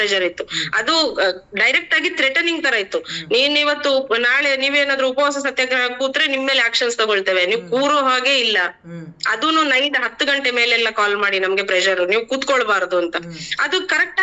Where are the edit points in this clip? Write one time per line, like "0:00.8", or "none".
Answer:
none

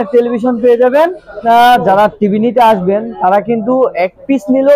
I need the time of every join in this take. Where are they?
0:01.4

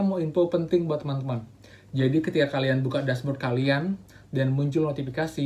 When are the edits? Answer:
none

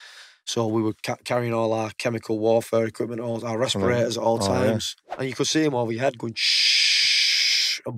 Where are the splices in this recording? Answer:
0:05.1

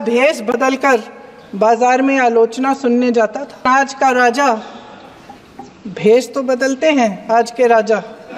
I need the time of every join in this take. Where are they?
0:03.6

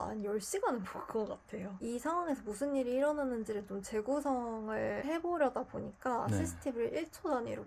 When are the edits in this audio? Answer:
none

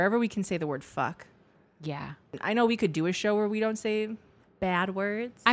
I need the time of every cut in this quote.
0:02.4

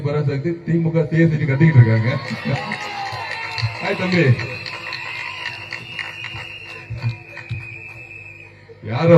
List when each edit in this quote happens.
none

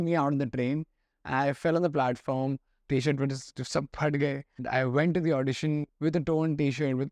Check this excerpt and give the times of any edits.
0:02.8
0:04.6
0:05.9

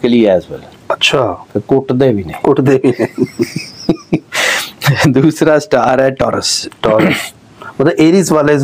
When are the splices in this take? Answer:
none

